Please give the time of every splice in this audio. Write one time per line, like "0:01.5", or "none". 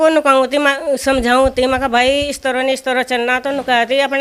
none